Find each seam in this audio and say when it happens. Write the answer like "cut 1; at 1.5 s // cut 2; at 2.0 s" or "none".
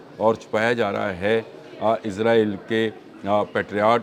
none